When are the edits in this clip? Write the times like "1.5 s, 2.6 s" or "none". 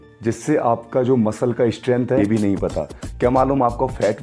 2.2 s